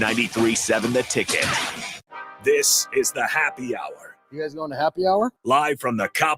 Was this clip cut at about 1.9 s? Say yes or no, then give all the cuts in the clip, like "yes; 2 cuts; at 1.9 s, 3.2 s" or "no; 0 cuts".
yes; 1 cut; at 1.9 s